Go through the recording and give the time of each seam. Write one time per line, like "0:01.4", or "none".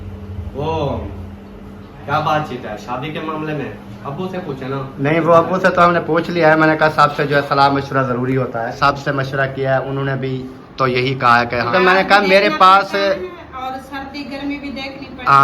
0:08.8
0:11.7